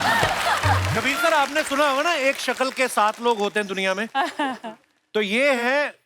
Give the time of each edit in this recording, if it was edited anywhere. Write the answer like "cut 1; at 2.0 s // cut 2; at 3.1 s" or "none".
cut 1; at 0.9 s